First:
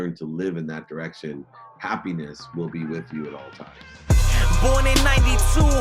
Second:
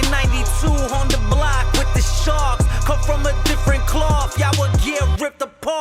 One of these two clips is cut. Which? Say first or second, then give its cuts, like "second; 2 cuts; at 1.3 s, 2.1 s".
first; 1 cut; at 3.9 s